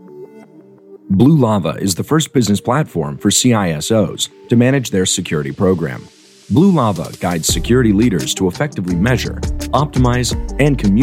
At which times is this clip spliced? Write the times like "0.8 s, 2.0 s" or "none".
1.0 s